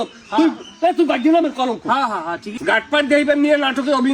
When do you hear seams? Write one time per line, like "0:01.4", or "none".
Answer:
0:02.5